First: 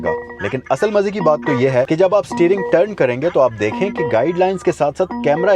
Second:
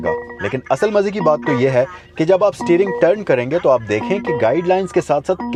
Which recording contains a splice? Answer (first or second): first